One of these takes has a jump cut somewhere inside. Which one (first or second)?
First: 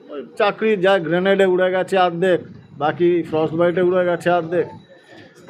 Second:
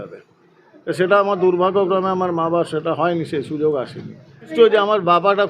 second